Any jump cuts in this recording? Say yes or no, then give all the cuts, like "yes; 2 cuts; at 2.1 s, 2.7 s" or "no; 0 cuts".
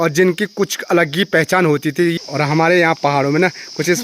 yes; 1 cut; at 2.1 s